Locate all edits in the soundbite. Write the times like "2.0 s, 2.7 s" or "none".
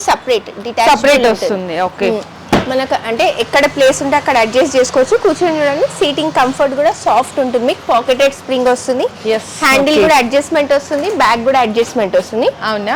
none